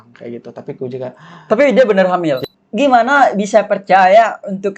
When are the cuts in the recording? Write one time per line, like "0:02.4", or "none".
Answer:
0:02.4